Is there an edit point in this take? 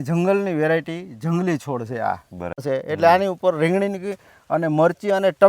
yes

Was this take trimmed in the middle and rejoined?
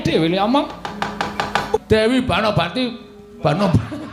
yes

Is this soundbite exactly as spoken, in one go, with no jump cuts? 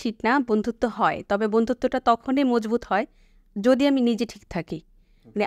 yes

